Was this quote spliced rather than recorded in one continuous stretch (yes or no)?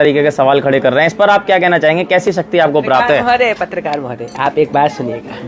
no